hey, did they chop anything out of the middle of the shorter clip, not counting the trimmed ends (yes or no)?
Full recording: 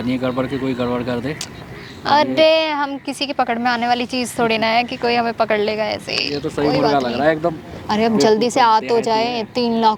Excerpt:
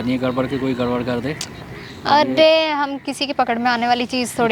no